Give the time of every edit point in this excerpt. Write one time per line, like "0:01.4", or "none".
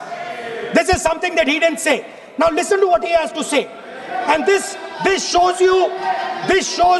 none